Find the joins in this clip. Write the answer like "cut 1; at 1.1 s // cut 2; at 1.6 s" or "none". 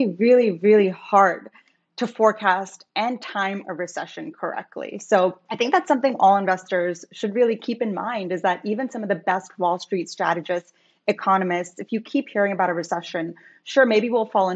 cut 1; at 5.4 s